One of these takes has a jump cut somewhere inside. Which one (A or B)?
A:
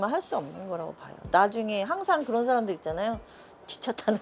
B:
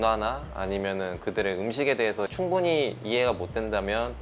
B